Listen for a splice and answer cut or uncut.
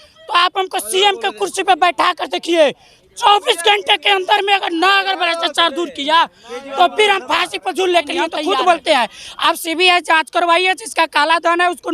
cut